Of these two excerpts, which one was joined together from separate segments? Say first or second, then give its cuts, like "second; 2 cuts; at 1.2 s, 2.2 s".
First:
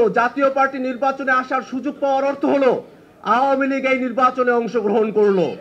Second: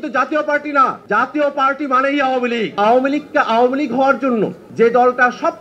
second; 3 cuts; at 1.0 s, 2.8 s, 4.6 s